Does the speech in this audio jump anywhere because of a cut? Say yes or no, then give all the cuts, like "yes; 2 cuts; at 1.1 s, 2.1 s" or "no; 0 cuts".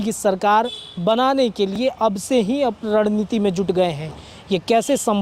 no; 0 cuts